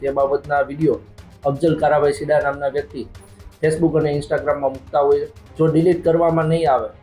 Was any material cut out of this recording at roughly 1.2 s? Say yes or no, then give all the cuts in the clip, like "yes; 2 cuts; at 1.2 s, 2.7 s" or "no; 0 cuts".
no; 1 cut; at 5.4 s